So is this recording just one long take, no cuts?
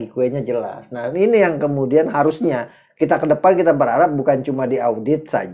yes; 0 cuts

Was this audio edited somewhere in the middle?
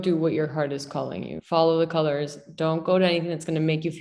no; 0 cuts

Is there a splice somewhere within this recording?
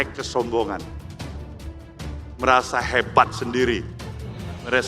no; 0 cuts

